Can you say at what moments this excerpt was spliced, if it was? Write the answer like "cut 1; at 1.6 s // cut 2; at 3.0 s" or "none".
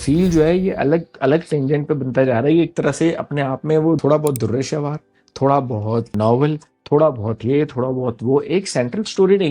cut 1; at 4.0 s // cut 2; at 6.1 s